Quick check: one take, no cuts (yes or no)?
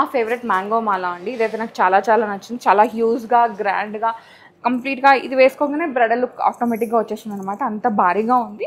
yes